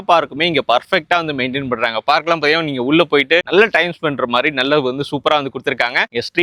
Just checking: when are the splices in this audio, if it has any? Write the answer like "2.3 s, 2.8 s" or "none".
none